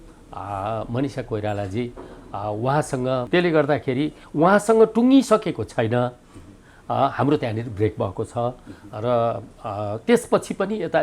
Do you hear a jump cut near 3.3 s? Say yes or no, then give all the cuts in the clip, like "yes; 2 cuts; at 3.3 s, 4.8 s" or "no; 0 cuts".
yes; 1 cut; at 3.3 s